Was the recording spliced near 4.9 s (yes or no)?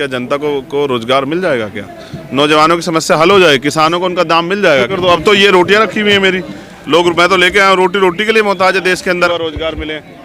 yes